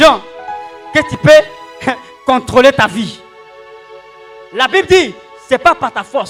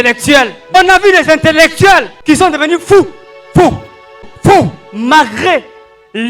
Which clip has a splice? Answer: second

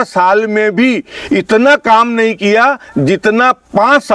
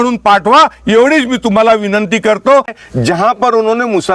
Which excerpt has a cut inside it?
second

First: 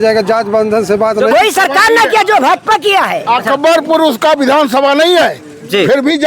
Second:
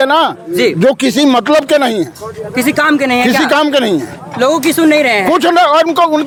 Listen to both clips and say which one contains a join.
first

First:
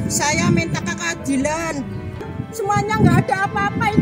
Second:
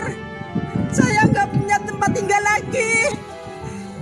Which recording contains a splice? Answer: first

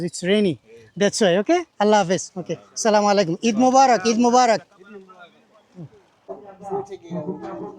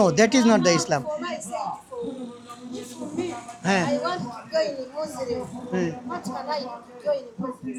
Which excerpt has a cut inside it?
first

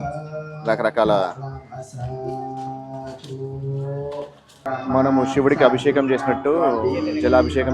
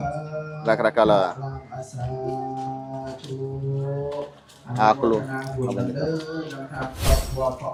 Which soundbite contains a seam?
first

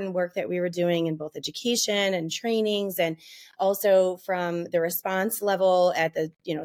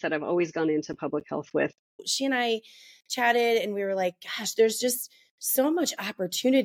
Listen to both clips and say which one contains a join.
second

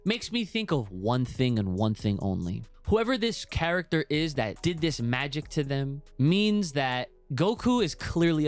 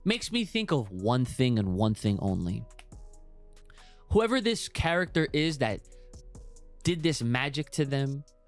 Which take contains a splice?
first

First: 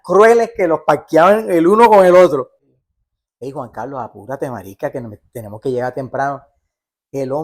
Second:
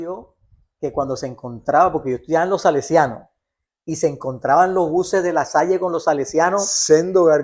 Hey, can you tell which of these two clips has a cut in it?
first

